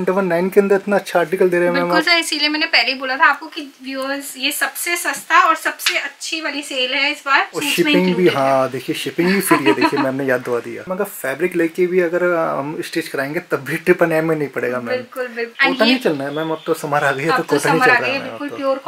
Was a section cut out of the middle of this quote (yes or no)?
yes